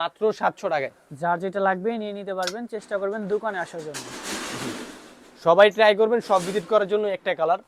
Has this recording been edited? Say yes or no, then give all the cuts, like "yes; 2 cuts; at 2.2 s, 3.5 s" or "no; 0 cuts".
no; 0 cuts